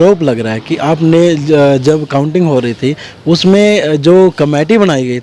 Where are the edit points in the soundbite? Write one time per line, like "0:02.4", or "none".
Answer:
none